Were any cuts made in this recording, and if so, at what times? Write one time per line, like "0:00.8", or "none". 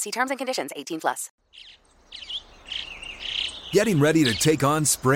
0:01.3

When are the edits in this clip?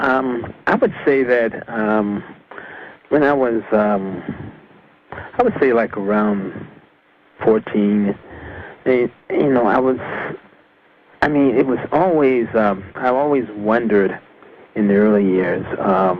0:06.4

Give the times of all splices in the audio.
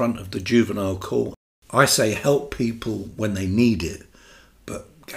0:01.4

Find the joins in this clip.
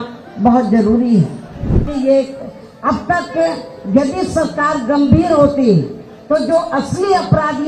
0:01.9

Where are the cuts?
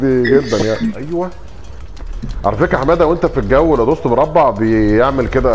0:01.0

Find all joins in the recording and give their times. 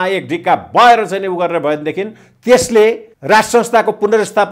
0:03.1

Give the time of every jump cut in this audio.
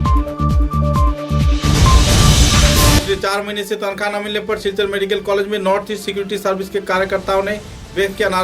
0:03.0

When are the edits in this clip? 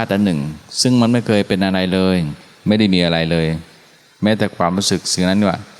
none

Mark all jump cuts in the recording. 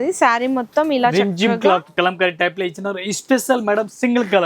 0:01.9

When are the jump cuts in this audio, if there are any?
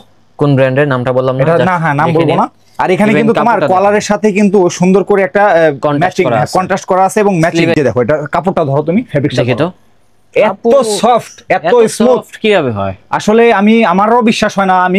0:07.8

